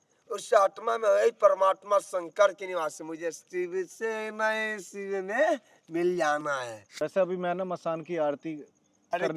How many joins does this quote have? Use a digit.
1